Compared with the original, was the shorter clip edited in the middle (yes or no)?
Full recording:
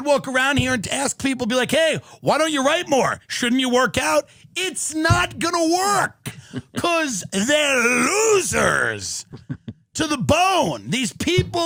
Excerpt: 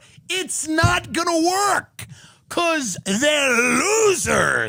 no